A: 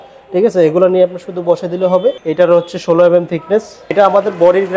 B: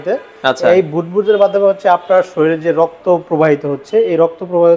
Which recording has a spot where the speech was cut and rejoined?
A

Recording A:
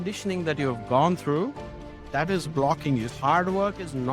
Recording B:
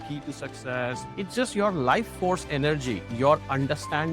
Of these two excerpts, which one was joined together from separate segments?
B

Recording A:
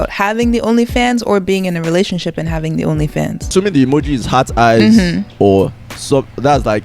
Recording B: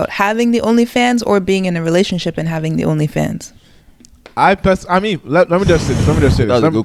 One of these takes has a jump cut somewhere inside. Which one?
A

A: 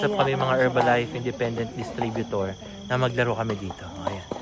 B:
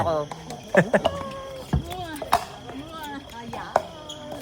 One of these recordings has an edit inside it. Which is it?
B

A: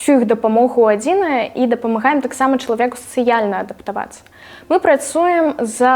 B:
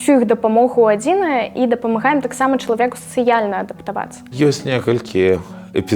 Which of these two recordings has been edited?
B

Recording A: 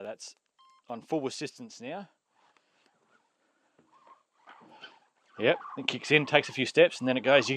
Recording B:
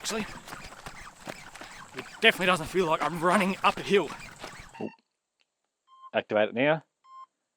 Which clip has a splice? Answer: B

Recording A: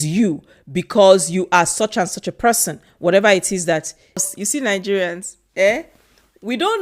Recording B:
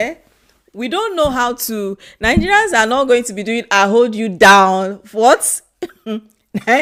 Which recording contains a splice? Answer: A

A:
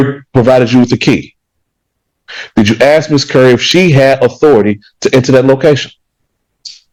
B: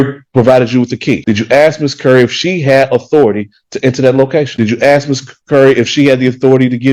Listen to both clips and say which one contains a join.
B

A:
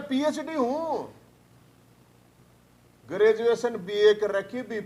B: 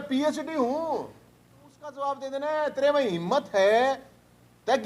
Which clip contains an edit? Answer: B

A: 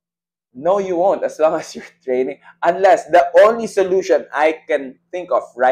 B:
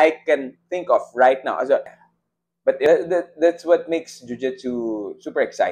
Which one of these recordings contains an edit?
B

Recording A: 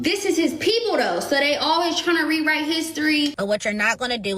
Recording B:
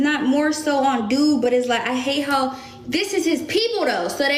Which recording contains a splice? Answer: A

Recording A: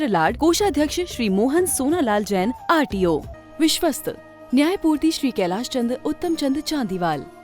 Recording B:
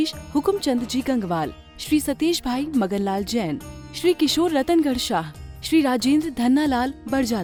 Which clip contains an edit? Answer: A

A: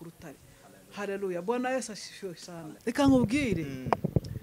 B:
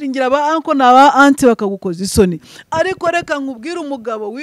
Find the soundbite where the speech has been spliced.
A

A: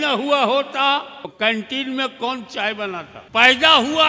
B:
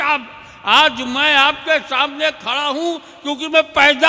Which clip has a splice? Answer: A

